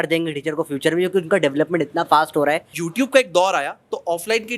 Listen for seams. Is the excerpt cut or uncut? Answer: cut